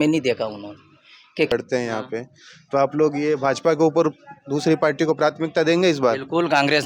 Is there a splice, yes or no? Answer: yes